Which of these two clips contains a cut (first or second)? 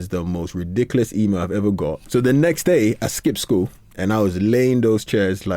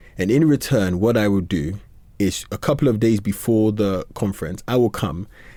first